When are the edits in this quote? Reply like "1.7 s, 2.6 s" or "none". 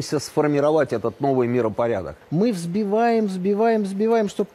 1.6 s